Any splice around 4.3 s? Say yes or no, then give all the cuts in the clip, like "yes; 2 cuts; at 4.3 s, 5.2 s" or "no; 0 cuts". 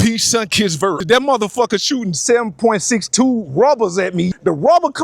yes; 2 cuts; at 1.0 s, 4.3 s